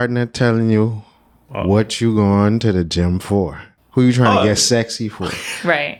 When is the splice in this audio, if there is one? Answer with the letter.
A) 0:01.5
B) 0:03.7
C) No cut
C